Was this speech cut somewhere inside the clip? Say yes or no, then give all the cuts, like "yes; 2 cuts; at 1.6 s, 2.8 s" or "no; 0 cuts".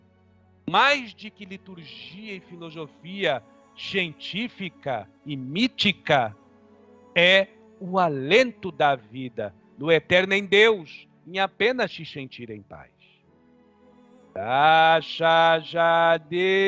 no; 0 cuts